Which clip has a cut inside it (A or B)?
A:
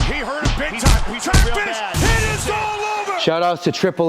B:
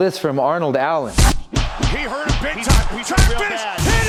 A